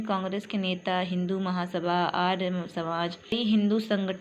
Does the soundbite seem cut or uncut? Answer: cut